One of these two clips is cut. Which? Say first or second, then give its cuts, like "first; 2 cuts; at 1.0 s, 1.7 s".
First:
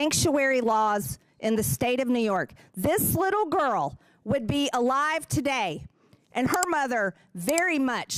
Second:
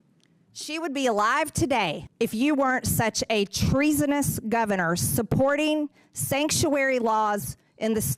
second; 1 cut; at 2.0 s